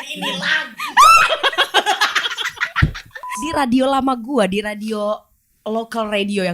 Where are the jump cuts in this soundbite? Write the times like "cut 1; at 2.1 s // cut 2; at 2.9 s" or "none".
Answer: cut 1; at 3.3 s